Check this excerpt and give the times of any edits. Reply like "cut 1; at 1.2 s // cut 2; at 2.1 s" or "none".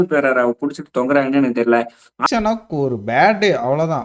cut 1; at 2.2 s